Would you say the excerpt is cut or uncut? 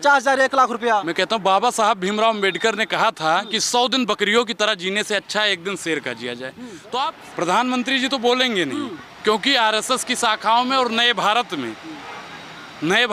cut